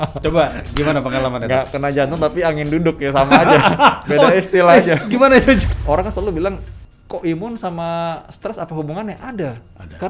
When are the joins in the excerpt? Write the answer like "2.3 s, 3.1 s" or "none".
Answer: 5.6 s